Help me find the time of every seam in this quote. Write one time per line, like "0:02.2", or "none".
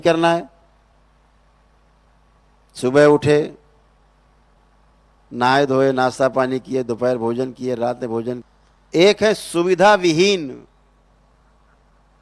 0:08.4